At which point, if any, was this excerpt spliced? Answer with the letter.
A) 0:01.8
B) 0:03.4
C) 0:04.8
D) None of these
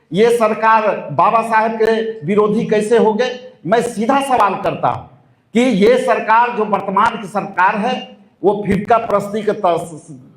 D